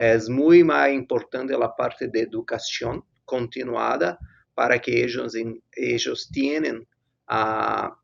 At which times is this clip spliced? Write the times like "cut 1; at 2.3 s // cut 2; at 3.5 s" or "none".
none